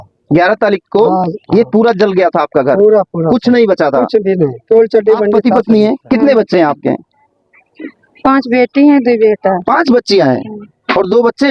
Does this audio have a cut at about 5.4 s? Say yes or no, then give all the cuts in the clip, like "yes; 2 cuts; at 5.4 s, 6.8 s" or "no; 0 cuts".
yes; 1 cut; at 5.4 s